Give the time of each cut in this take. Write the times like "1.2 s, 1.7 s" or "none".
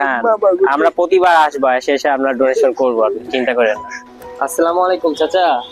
3.9 s